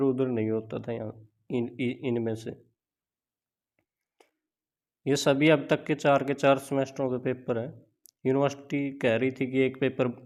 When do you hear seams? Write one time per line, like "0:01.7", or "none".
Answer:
none